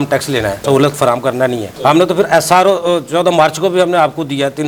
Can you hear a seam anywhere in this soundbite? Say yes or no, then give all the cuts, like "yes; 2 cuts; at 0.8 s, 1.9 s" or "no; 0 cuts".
no; 0 cuts